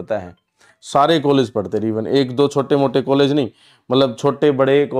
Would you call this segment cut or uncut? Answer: uncut